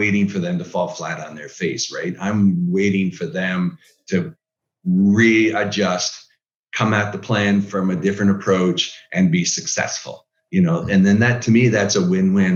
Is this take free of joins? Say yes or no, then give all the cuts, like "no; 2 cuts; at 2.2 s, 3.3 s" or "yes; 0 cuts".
yes; 0 cuts